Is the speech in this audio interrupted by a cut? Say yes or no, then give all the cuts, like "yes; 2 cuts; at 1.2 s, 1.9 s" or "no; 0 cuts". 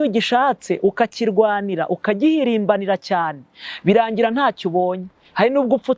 no; 0 cuts